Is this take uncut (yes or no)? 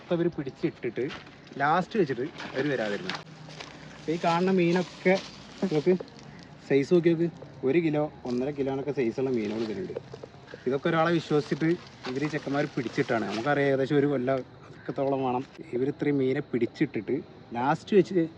no